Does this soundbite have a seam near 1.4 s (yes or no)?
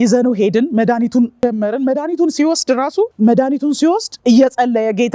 yes